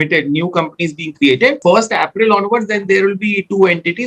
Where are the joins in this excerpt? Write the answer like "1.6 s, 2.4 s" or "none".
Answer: 1.6 s